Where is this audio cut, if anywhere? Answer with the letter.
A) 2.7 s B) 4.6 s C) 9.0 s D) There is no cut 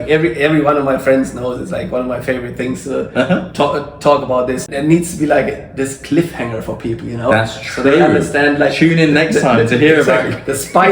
B